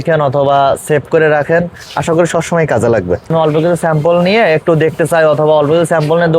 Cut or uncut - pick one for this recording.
cut